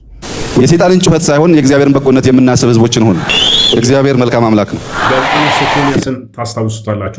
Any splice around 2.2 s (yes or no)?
no